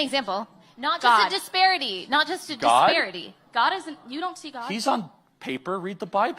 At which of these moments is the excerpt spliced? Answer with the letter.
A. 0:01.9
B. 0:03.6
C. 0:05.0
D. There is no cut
A